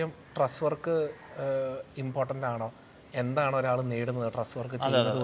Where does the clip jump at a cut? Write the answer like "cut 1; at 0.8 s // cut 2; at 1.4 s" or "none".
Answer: none